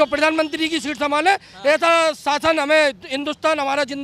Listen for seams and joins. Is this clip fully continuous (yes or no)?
yes